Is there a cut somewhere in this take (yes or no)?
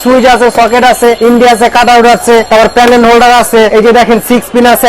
yes